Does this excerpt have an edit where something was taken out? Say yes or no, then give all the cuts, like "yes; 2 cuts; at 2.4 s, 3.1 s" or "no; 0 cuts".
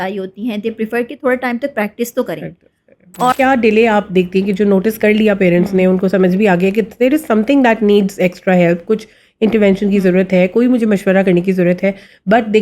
yes; 1 cut; at 3.3 s